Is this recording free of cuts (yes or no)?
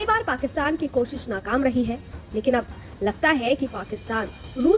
yes